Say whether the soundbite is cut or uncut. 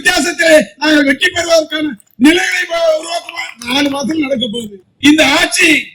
cut